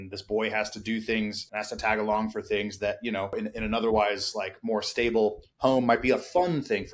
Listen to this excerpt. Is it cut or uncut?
cut